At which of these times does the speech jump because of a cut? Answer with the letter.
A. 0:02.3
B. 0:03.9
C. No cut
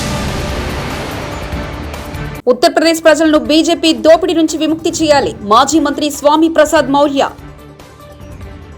A